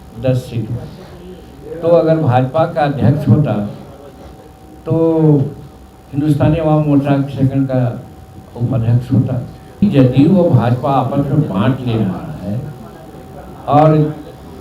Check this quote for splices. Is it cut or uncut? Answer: cut